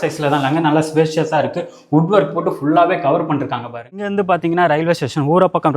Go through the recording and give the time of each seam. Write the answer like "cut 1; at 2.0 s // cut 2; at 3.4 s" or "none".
cut 1; at 3.8 s